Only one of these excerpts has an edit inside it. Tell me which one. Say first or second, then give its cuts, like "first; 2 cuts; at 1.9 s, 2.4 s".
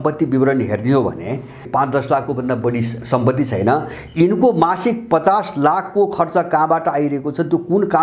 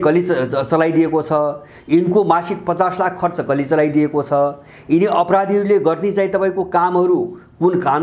first; 1 cut; at 1.6 s